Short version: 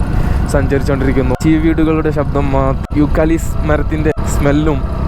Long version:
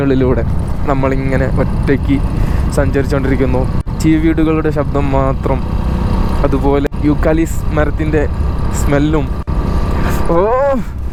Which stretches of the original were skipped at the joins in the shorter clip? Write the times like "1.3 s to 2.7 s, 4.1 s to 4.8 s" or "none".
3.6 s to 4.0 s, 5.4 s to 6.9 s, 8.2 s to 8.6 s